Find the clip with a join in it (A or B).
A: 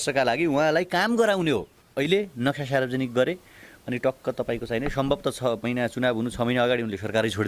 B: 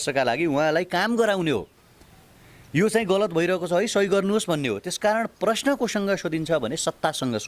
A